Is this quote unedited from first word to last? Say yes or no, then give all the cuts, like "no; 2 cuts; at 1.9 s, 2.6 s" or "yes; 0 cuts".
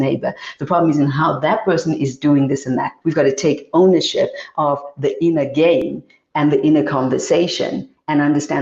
no; 1 cut; at 2.9 s